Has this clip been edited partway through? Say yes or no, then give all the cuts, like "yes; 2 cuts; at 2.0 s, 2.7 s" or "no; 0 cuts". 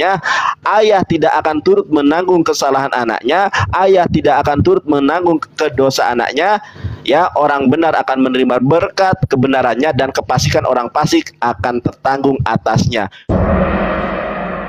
yes; 1 cut; at 13.2 s